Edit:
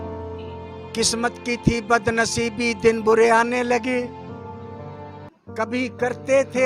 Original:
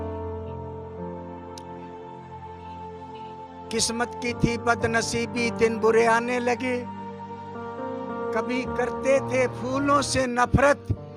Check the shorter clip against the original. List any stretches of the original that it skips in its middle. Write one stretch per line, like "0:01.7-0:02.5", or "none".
0:00.9-0:03.7